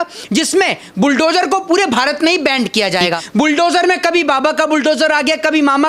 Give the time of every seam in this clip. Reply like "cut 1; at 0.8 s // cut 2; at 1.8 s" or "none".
cut 1; at 3.2 s

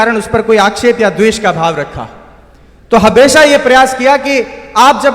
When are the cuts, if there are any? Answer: none

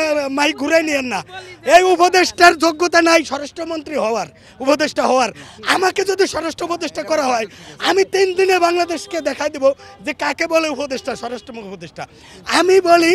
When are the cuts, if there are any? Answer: none

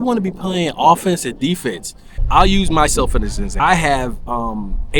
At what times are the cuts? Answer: cut 1; at 2.2 s // cut 2; at 3.5 s

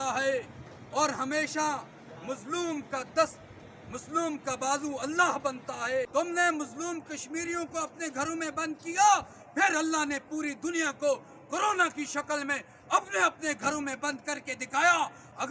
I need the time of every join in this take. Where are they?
cut 1; at 6.1 s

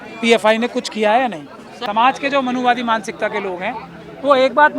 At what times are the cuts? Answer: cut 1; at 1.7 s

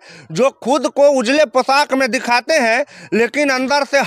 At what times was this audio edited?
none

